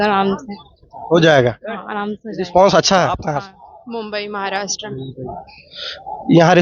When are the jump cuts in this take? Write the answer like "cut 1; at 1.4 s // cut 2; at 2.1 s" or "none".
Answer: cut 1; at 3.2 s

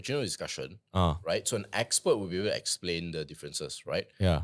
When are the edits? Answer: none

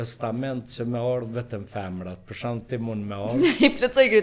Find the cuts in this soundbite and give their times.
none

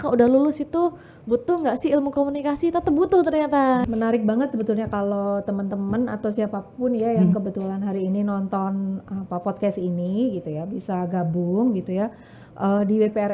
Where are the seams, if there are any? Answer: cut 1; at 3.9 s

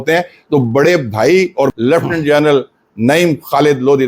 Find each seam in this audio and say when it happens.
cut 1; at 1.7 s

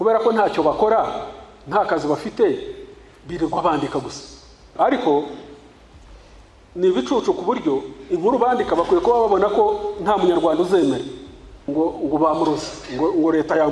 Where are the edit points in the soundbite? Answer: cut 1; at 4.7 s // cut 2; at 11.6 s

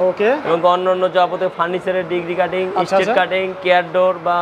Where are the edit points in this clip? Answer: none

